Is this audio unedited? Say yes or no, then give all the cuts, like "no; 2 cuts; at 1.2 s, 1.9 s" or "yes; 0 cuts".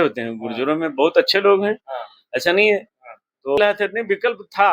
no; 1 cut; at 3.6 s